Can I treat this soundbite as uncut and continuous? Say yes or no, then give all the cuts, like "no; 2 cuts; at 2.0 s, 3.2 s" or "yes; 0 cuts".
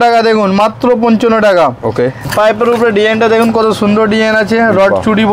no; 1 cut; at 2.3 s